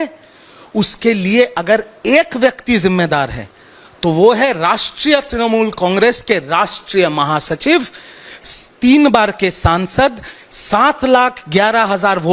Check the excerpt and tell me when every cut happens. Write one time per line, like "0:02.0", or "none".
none